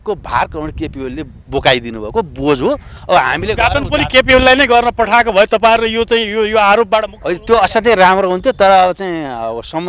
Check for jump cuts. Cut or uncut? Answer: uncut